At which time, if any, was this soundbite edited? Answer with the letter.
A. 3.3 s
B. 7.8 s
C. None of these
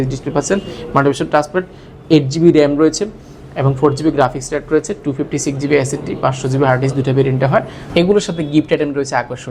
B